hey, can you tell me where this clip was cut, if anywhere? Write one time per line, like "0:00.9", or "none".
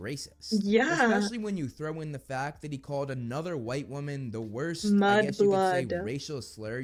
none